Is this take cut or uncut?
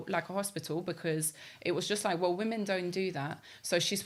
uncut